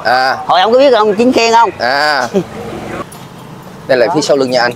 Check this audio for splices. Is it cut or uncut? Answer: cut